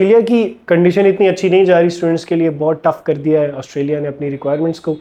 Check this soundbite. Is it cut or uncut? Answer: uncut